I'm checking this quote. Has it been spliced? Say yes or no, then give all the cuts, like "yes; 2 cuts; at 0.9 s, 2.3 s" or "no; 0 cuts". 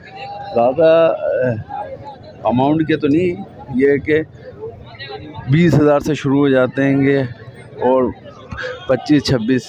no; 0 cuts